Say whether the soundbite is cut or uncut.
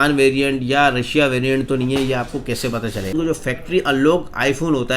cut